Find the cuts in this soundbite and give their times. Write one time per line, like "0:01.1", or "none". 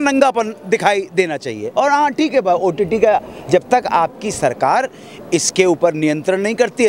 none